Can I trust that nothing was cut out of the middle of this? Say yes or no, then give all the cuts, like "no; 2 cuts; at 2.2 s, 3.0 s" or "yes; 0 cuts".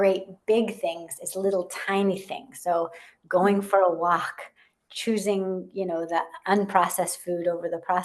yes; 0 cuts